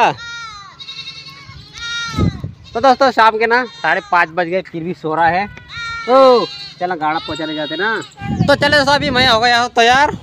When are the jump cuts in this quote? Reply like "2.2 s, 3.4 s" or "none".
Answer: 8.1 s